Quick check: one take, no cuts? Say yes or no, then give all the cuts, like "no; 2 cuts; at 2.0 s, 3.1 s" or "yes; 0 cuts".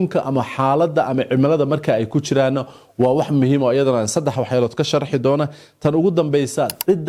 yes; 0 cuts